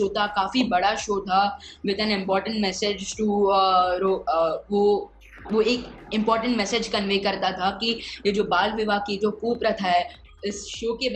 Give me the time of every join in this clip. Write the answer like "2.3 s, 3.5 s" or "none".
10.2 s